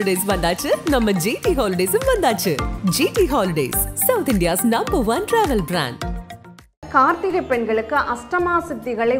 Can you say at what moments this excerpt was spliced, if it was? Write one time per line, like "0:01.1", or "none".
0:06.8

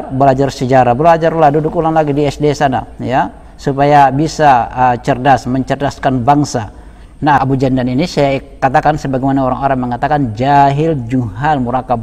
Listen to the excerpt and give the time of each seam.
0:07.4

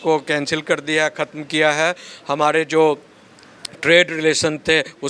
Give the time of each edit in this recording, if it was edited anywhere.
none

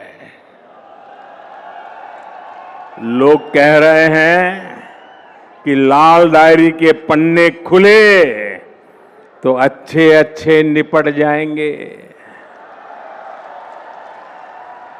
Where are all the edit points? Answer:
none

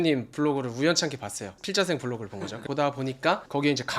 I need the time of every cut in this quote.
0:02.6

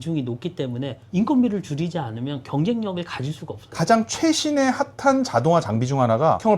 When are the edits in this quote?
0:03.7

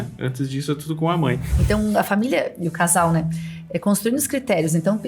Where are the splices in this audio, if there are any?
0:01.5

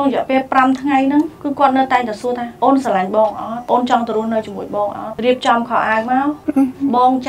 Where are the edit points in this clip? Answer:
0:01.4
0:02.5
0:03.5
0:05.1
0:06.4

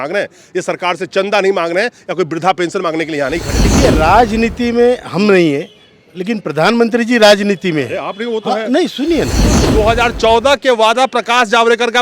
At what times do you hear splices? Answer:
0:03.7
0:09.6

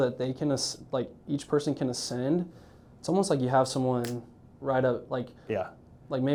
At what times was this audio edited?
none

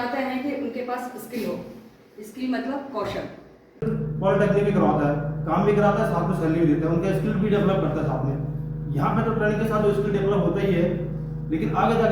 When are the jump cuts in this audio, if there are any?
0:04.1

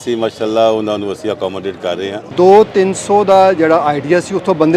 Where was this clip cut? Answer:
0:02.3

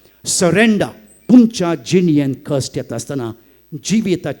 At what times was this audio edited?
0:01.1

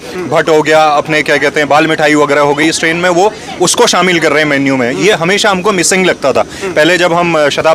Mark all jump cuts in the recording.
none

